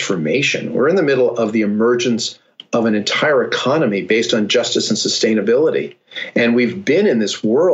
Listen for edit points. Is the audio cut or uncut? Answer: uncut